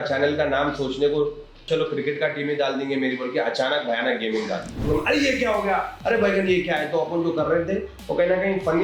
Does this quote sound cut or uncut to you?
cut